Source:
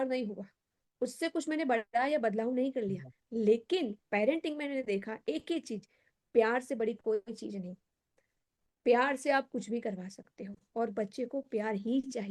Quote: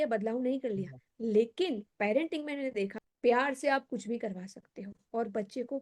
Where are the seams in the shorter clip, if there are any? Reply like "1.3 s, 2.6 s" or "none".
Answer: 3.0 s